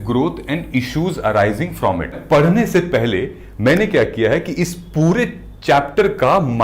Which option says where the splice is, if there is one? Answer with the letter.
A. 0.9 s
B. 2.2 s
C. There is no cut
B